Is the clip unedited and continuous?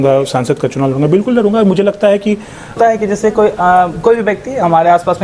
no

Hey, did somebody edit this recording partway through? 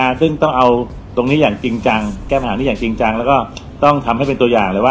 no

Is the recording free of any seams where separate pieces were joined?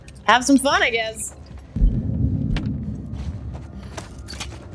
no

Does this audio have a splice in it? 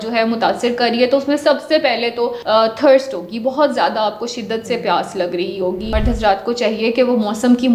yes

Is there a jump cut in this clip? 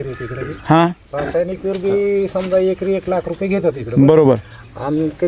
no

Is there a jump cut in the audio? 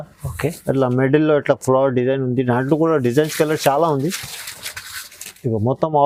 no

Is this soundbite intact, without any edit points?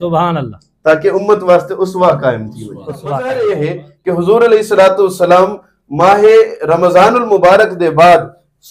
no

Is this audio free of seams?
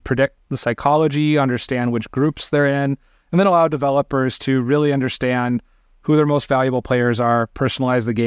yes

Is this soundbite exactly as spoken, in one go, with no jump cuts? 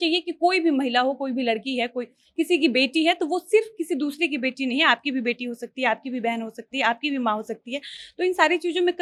yes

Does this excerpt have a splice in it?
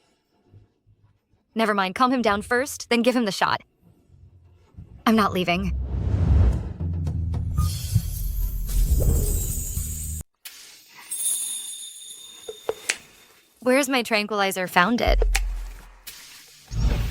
yes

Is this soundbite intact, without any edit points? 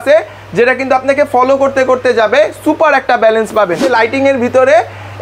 no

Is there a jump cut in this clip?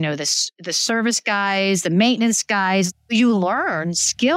yes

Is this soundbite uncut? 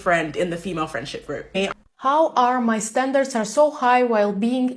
no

